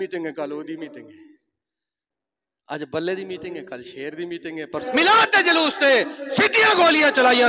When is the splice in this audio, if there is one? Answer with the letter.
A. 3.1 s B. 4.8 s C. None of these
B